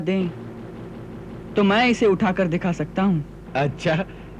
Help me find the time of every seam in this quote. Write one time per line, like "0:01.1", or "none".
0:03.4

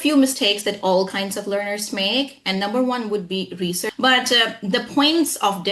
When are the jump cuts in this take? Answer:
0:03.8

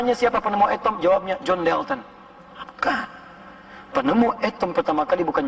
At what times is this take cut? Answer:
none

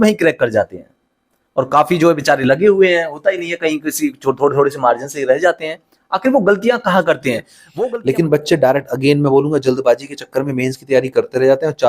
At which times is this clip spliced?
0:07.6

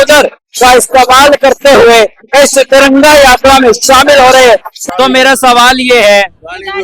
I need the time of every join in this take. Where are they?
0:04.8

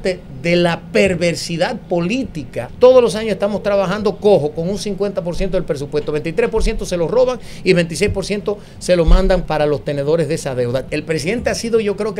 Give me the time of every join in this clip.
0:02.7
0:09.4
0:10.8

